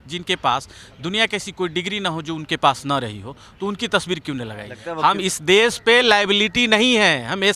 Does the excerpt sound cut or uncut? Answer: cut